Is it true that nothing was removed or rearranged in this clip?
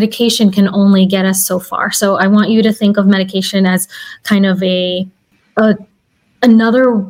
yes; 0 cuts

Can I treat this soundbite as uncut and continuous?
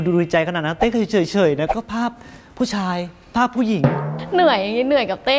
no; 1 cut; at 4.2 s

